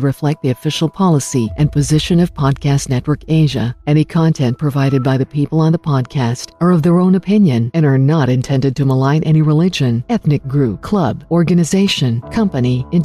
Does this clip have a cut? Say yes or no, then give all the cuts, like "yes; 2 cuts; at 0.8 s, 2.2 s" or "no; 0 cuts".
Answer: no; 0 cuts